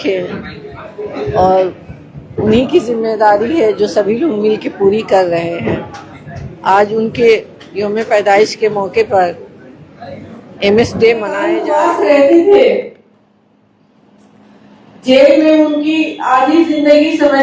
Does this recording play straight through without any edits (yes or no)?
no